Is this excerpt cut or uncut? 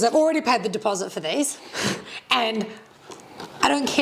uncut